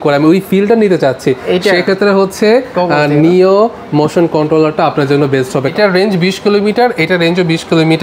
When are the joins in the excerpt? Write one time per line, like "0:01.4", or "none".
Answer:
0:05.7